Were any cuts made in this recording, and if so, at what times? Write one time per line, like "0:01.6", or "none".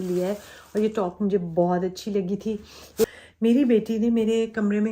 0:03.0

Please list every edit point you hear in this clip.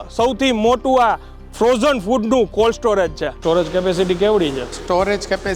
0:03.4

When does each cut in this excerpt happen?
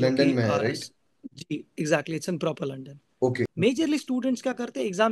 0:03.5

